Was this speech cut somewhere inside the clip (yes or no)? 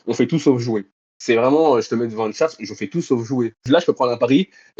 yes